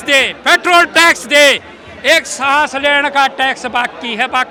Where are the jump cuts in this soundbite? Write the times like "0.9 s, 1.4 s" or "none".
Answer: none